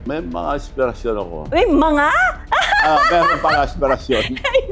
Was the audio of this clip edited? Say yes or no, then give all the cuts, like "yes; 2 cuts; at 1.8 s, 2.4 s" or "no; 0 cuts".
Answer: no; 0 cuts